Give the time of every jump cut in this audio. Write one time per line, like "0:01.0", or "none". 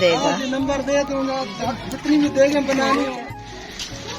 0:03.1